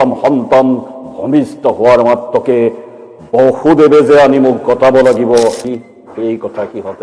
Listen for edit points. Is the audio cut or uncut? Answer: cut